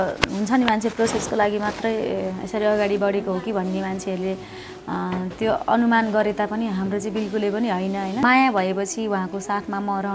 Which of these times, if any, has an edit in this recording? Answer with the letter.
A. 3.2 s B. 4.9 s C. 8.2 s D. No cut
C